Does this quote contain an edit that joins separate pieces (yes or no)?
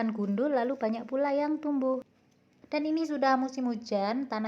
yes